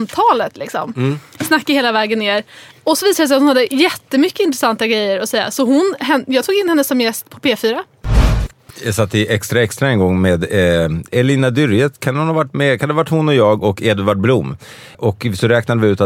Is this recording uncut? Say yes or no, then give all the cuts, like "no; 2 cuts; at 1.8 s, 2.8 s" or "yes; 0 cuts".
no; 3 cuts; at 8.3 s, 11.1 s, 15.0 s